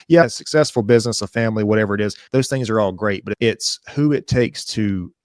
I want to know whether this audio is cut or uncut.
uncut